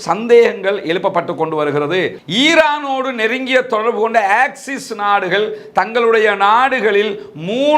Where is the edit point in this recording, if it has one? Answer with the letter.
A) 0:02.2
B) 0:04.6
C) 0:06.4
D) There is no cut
A